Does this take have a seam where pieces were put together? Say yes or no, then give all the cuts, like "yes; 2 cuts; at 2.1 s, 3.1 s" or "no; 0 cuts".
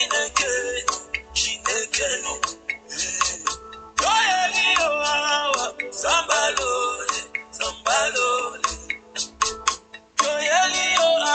no; 0 cuts